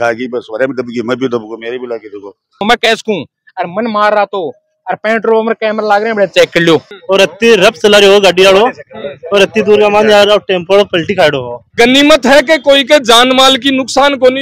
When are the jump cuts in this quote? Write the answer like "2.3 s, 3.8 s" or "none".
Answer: 2.6 s, 6.9 s, 11.7 s